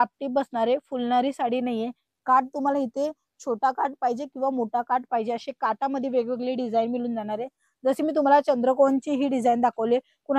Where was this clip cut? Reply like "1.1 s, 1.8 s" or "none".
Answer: none

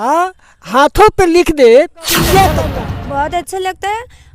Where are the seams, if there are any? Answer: 2.7 s

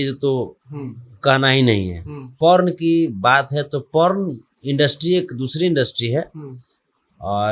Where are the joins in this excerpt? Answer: 2.3 s

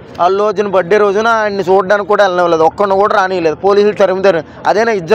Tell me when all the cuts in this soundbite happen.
none

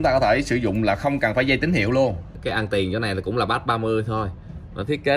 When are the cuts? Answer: 2.3 s

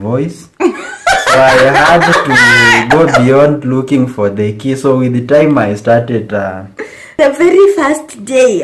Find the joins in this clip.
7.2 s

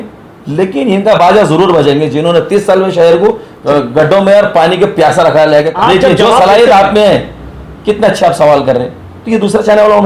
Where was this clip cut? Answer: 5.7 s

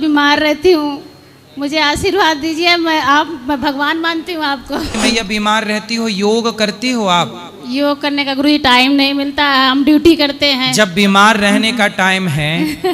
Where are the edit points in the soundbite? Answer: 4.9 s

